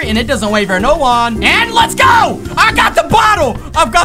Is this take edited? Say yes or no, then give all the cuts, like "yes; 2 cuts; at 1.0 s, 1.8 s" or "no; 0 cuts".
yes; 1 cut; at 1.4 s